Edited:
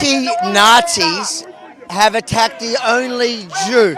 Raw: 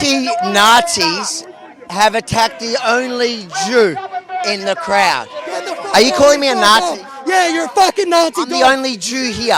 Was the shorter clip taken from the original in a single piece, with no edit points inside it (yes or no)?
yes